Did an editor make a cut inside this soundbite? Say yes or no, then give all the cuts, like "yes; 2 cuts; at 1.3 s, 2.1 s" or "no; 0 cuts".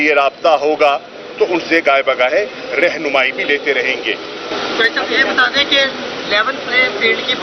no; 0 cuts